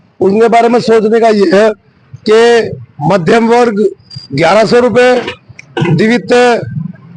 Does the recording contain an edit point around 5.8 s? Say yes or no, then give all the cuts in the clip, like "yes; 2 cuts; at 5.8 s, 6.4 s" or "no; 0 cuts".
no; 0 cuts